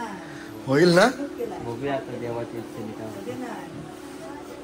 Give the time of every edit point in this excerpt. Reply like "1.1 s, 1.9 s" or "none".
none